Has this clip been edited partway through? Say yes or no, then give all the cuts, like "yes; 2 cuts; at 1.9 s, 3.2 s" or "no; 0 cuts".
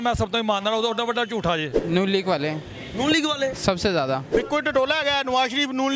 yes; 2 cuts; at 1.7 s, 4.2 s